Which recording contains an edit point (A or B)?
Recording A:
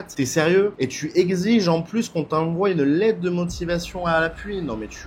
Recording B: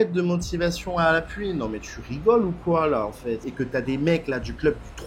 B